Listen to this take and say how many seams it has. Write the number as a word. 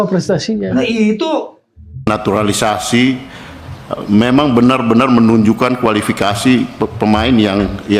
one